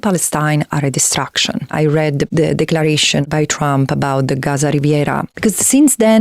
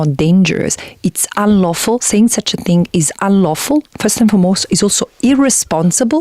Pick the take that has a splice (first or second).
first